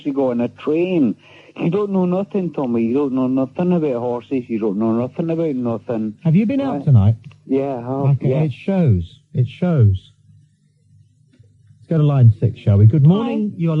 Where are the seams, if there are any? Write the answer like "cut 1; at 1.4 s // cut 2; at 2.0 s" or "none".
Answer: none